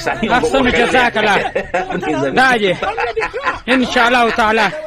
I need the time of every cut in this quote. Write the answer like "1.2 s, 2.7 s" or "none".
none